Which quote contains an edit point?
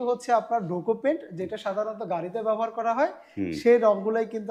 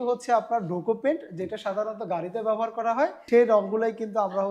second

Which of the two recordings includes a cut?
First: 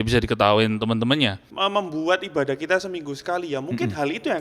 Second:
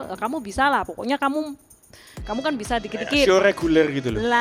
first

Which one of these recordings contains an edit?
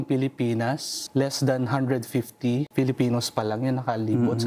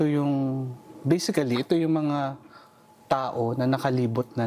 first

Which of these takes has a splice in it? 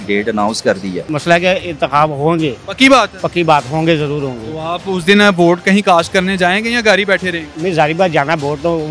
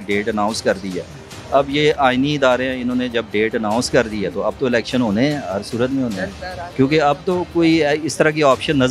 first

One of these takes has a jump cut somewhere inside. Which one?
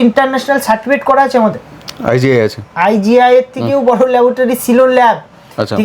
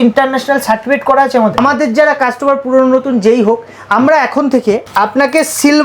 second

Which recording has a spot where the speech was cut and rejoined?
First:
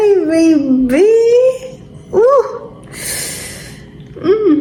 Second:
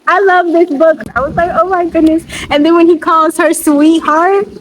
second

